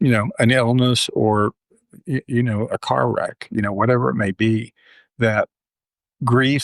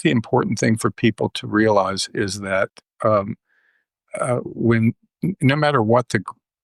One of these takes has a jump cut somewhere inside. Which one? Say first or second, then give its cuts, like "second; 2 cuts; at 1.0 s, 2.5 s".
first; 1 cut; at 5.7 s